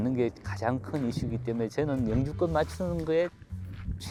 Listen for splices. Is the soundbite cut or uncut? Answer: uncut